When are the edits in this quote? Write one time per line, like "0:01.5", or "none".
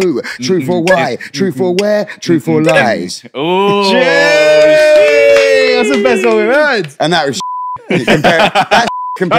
none

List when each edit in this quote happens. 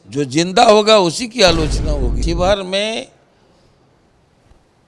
0:02.1

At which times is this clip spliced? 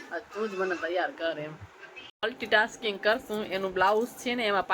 0:02.1

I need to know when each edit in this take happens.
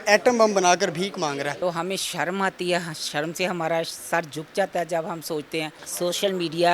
0:01.5
0:05.8

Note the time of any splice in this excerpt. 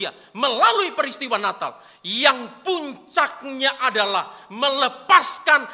none

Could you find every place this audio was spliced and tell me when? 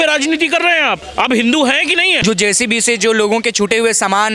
0:01.0
0:02.2

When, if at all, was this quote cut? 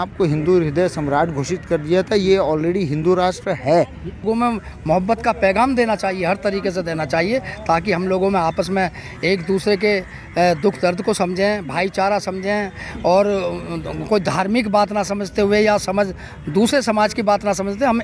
0:04.2

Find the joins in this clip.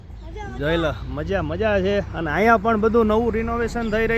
0:01.5

